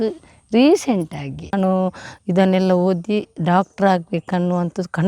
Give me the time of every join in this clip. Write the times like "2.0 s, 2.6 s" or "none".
1.5 s